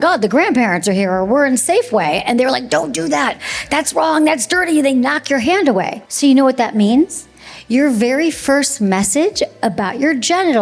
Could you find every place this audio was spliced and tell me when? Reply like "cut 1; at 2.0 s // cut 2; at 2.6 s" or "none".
cut 1; at 6.0 s